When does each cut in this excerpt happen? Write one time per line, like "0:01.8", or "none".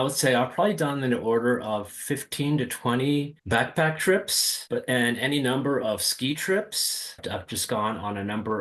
0:07.2

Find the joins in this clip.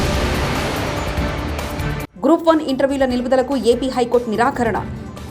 0:02.0

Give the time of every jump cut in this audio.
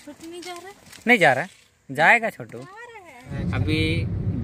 0:03.3

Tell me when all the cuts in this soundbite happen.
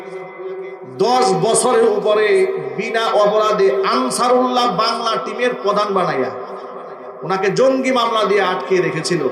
none

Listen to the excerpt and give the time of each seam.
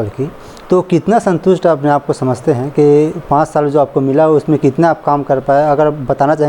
none

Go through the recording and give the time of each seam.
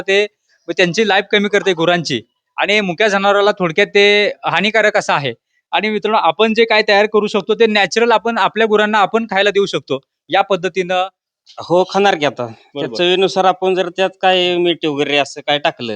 0:11.2

